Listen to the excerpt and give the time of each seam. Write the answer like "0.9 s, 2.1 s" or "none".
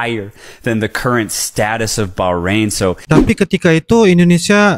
3.0 s